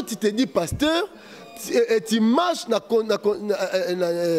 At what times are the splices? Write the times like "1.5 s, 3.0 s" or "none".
none